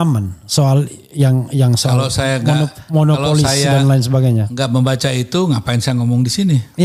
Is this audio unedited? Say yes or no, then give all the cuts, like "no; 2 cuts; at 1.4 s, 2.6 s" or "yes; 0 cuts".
yes; 0 cuts